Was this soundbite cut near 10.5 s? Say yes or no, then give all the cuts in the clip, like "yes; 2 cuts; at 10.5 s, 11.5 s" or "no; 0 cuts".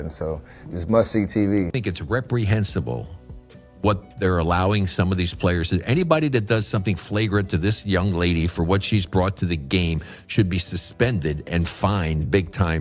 no; 1 cut; at 1.7 s